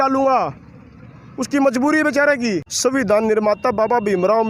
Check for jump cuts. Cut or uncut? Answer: cut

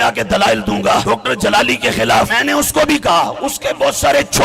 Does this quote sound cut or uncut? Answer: cut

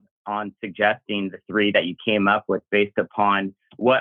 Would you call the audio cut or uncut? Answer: uncut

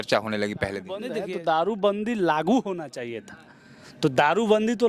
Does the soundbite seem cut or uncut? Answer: cut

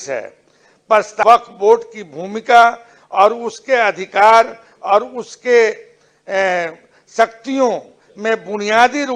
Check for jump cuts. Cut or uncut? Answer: cut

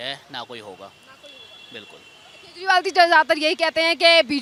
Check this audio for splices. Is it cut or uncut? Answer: uncut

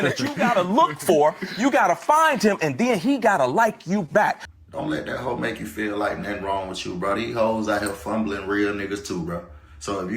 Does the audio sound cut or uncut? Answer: cut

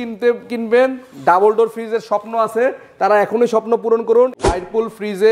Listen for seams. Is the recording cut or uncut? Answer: cut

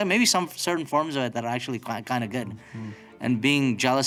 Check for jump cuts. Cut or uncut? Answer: uncut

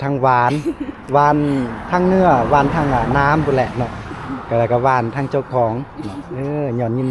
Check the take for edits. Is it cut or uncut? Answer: uncut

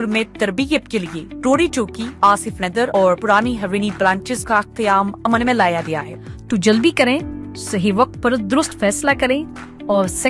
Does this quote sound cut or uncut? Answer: cut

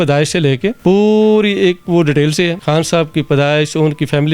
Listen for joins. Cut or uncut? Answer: cut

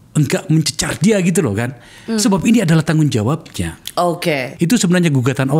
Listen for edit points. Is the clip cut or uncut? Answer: cut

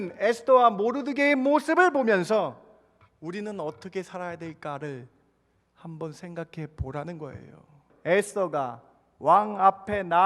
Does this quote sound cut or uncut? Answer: cut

